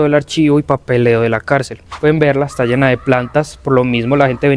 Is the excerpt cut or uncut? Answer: cut